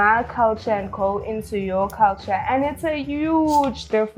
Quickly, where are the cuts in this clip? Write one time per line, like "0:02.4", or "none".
none